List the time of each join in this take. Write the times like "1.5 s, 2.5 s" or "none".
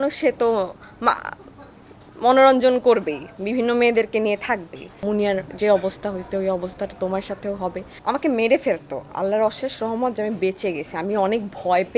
4.9 s, 7.9 s